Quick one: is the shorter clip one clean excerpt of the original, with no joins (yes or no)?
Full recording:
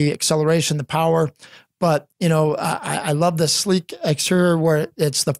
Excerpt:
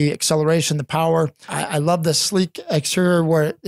no